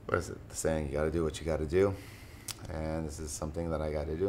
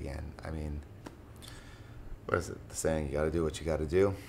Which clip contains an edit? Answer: second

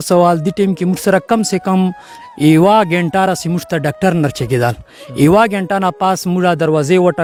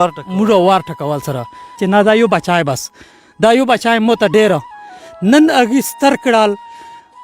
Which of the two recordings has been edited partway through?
second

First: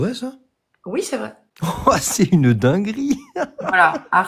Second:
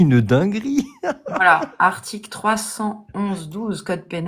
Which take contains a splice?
first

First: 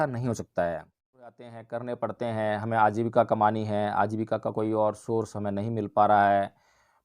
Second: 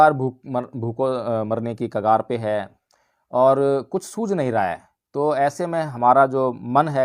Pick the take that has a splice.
first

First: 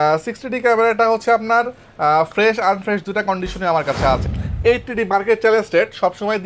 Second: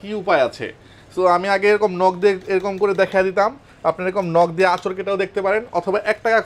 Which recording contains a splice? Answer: first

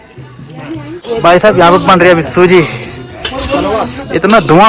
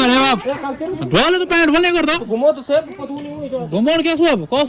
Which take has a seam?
first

